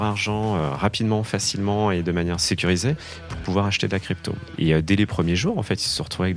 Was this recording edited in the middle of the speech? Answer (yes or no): yes